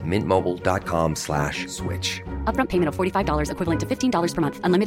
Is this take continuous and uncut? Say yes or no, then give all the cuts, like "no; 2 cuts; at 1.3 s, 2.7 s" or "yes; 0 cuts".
yes; 0 cuts